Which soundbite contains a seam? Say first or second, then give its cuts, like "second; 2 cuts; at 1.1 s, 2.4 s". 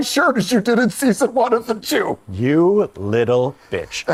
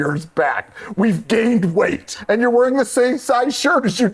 second; 1 cut; at 2.1 s